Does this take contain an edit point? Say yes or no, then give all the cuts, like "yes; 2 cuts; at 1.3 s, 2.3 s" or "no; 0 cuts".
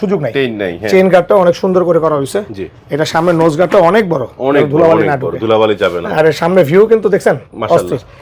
no; 0 cuts